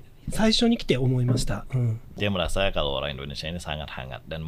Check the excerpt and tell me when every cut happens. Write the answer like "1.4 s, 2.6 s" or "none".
2.0 s